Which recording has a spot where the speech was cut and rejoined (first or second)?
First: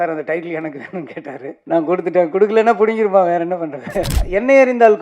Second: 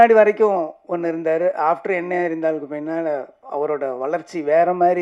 first